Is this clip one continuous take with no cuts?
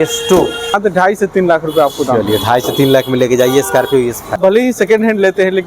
no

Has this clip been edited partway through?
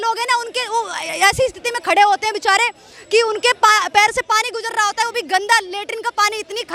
no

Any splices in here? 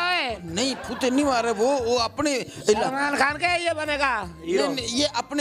no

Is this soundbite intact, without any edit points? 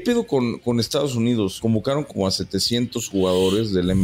no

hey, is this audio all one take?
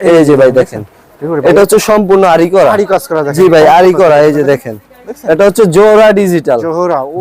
yes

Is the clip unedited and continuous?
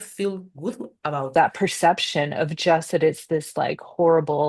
no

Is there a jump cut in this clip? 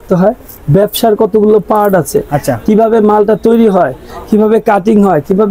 no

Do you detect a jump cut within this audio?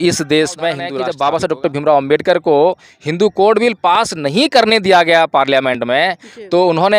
yes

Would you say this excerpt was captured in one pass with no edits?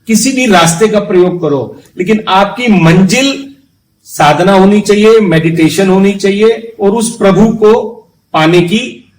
yes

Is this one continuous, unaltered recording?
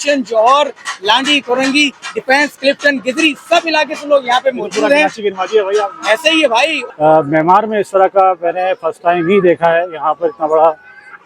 no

